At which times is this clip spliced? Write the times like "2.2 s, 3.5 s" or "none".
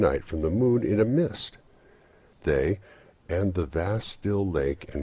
3.0 s